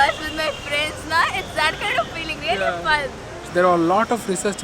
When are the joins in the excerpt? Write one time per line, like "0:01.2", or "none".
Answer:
0:03.4